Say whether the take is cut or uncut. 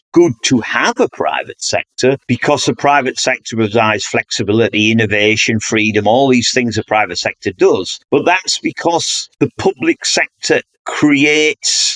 uncut